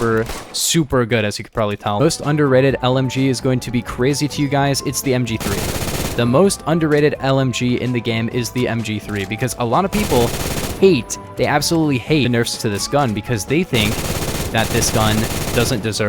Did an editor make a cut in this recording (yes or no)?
yes